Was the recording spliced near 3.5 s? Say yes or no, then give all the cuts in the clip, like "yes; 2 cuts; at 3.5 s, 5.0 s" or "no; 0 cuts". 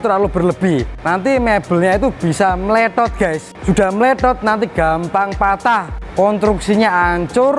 yes; 3 cuts; at 0.9 s, 3.5 s, 6.0 s